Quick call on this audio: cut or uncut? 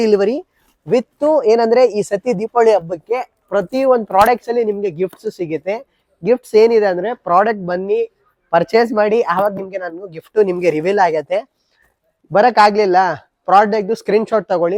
uncut